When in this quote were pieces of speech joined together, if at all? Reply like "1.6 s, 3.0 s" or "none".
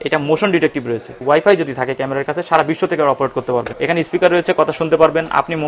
1.1 s, 3.7 s